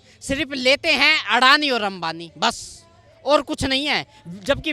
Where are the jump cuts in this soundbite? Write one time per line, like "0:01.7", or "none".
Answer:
none